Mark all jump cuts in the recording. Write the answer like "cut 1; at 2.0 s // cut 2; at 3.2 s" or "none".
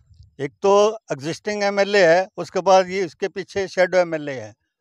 none